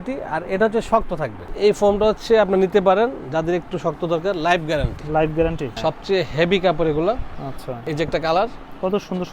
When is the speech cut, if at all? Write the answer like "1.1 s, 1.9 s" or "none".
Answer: 1.4 s, 5.8 s, 7.9 s